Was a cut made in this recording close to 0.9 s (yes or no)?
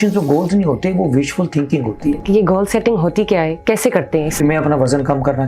no